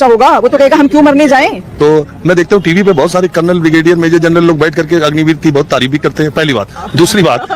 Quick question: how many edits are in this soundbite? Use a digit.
1